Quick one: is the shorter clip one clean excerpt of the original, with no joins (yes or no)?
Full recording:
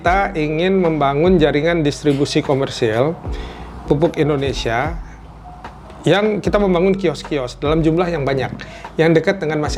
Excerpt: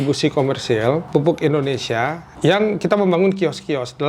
no